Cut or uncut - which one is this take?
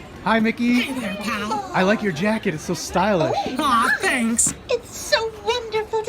cut